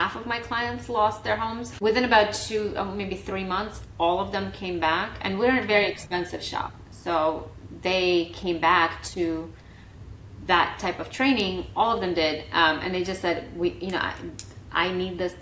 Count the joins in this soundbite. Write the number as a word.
one